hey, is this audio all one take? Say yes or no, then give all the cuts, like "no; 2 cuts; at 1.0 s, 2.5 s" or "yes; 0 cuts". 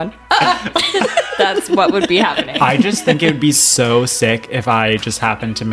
no; 1 cut; at 2.5 s